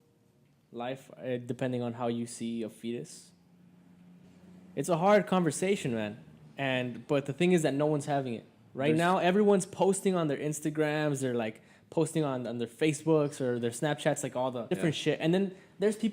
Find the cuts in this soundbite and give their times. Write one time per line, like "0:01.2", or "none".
0:04.2
0:14.7

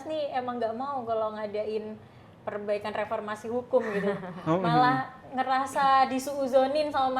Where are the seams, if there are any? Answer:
none

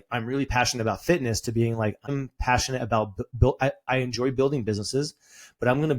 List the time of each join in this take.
0:02.1
0:03.3

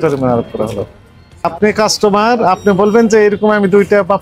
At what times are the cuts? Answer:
0:01.4

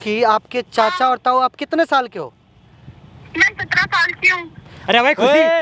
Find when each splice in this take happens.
none

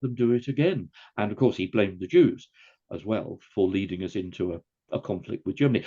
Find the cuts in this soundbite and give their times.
0:03.4

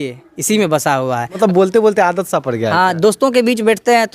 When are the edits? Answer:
0:01.3

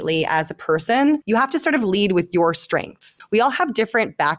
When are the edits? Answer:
0:01.2
0:03.1

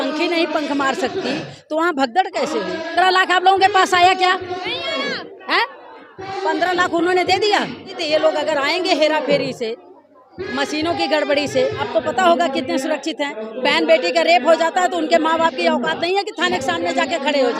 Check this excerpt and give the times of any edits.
0:02.9
0:08.0
0:11.8

